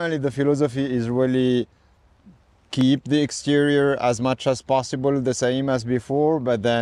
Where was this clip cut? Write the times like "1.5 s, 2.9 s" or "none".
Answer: none